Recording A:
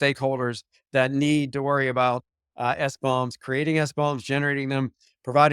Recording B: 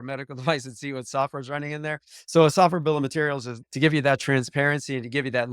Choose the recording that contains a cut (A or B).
B